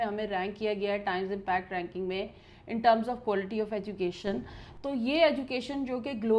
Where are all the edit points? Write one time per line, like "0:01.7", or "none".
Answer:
none